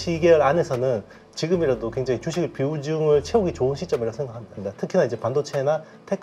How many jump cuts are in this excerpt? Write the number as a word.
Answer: one